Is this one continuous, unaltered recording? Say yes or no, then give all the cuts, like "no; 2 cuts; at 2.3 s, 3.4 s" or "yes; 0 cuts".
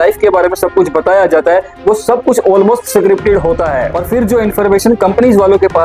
no; 1 cut; at 4.0 s